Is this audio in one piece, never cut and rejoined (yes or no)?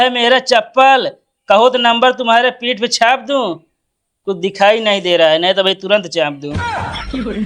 no